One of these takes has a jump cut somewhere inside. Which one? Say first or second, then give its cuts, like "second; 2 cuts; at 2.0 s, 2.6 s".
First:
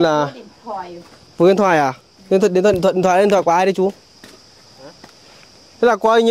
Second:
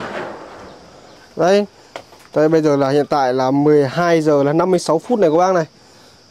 second; 1 cut; at 1.2 s